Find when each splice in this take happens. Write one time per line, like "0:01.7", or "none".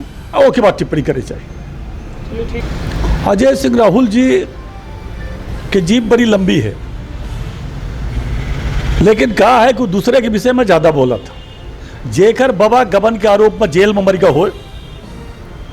0:02.6

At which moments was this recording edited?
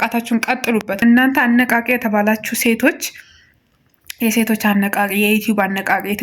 0:01.0

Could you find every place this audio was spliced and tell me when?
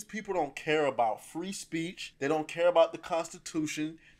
0:02.0

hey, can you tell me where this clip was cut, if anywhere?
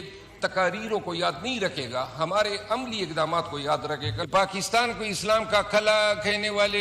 0:04.2

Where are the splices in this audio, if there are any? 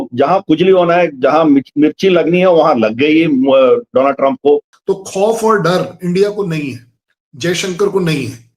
0:04.7

